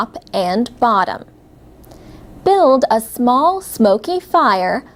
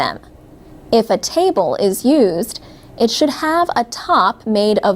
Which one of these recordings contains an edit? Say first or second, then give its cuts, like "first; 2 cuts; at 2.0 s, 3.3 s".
second; 1 cut; at 2.0 s